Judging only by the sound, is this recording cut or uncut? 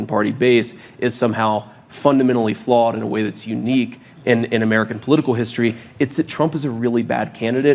uncut